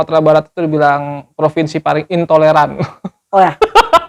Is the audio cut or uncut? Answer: uncut